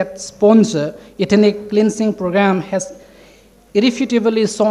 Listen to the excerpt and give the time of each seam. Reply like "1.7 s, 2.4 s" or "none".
none